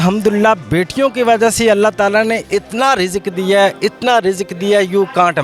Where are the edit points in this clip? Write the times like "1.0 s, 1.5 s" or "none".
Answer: none